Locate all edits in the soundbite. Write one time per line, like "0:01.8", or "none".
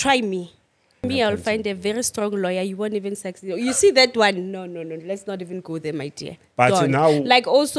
0:01.0

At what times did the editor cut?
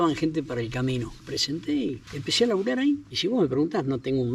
0:01.2
0:02.1
0:03.1

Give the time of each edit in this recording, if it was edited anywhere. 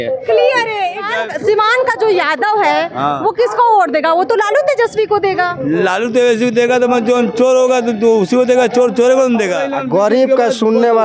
0:01.1
0:09.7

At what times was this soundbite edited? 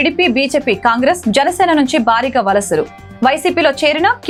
none

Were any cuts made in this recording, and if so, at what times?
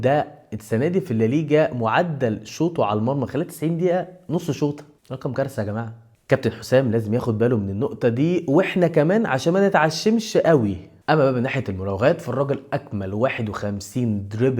0:10.8

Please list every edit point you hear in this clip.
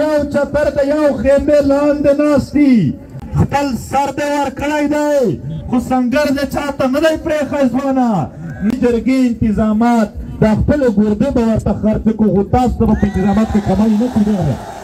0:03.1
0:08.7

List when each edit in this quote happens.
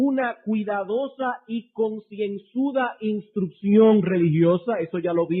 0:01.6

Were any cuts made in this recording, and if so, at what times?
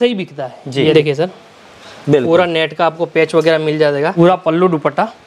0:00.9
0:04.2

